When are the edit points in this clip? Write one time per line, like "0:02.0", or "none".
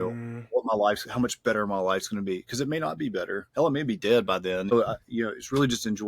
0:04.7